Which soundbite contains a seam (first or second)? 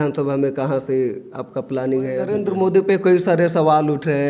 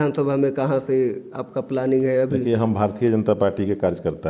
first